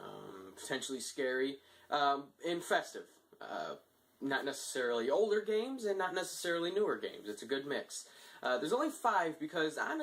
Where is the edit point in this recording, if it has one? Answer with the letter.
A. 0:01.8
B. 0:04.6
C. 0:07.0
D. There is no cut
D